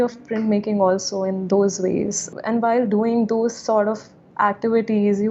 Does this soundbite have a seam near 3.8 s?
no; 1 cut; at 2.3 s

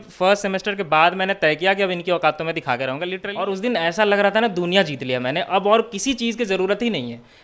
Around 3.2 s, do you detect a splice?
yes; 1 cut; at 3.2 s

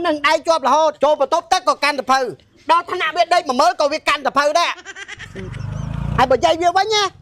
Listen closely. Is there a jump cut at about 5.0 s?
yes; 2 cuts; at 0.9 s, 5.0 s

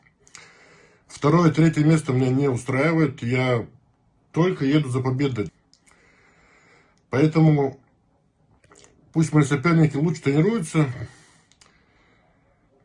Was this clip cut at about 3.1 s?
no; 0 cuts

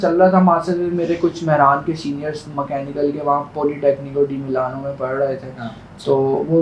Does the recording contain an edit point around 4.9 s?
no; 0 cuts

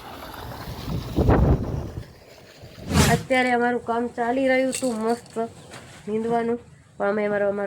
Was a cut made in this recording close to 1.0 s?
no; 1 cut; at 3.0 s

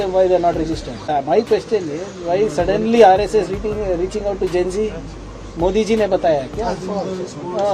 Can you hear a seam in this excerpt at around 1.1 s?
yes; 1 cut; at 1.1 s

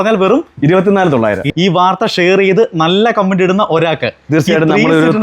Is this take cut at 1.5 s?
yes; 1 cut; at 1.5 s

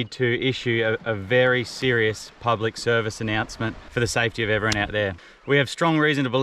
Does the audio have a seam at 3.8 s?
no; 0 cuts

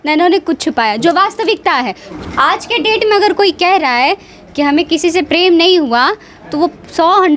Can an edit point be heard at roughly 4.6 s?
no; 1 cut; at 2.1 s

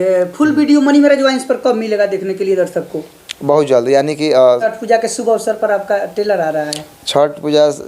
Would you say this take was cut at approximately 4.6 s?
yes; 1 cut; at 4.6 s

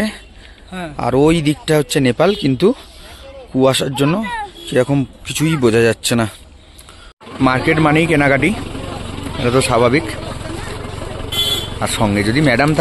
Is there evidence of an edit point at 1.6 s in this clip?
no; 1 cut; at 7.3 s

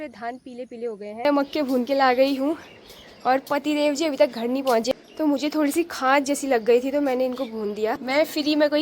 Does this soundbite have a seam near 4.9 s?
yes; 3 cuts; at 1.2 s, 4.9 s, 8.0 s

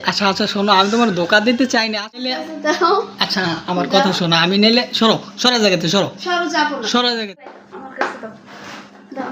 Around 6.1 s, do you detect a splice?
no; 2 cuts; at 2.3 s, 7.5 s

